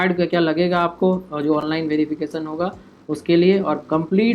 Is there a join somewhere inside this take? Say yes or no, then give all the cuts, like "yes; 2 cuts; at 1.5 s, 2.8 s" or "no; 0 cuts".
no; 0 cuts